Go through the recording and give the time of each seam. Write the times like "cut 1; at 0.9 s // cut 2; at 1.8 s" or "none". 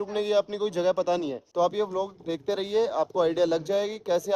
cut 1; at 1.4 s